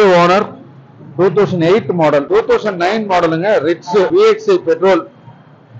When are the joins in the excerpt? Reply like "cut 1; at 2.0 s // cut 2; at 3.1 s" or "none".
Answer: cut 1; at 2.3 s // cut 2; at 4.1 s